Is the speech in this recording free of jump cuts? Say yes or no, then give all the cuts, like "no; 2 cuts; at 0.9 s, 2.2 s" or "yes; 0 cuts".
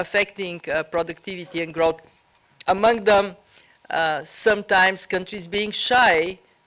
yes; 0 cuts